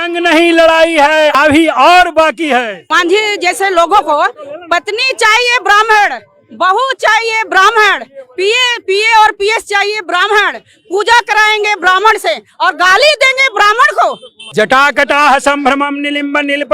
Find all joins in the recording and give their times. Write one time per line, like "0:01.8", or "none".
0:01.3
0:02.8
0:14.5